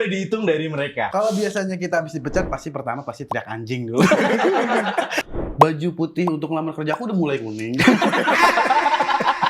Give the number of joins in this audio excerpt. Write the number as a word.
two